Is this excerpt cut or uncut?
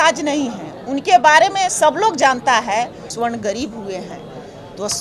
cut